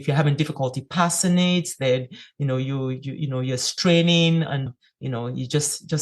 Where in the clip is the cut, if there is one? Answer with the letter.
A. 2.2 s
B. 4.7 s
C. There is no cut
B